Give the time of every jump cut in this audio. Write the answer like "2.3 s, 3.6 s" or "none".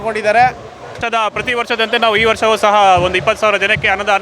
1.0 s